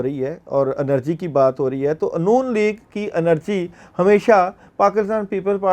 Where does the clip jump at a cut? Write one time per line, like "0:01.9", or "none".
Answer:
none